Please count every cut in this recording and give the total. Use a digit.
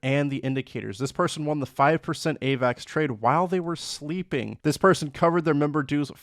1